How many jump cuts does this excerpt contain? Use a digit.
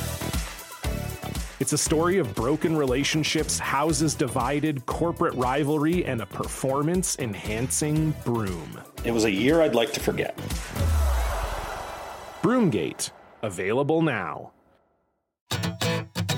1